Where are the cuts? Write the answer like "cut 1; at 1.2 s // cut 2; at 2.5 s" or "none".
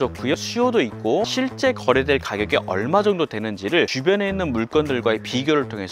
cut 1; at 1.3 s